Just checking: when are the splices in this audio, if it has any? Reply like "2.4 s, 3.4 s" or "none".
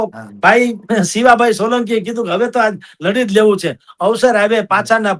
none